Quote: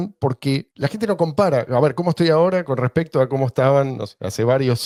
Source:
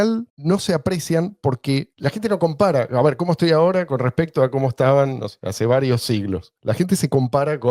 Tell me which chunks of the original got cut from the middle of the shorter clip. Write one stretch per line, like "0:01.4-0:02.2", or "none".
none